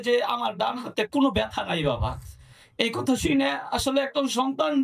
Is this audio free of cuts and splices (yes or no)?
yes